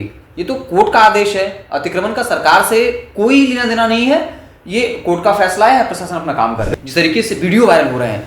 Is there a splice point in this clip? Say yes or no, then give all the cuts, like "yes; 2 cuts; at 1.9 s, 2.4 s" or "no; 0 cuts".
yes; 1 cut; at 6.7 s